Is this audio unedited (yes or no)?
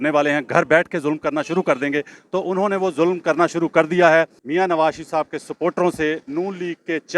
no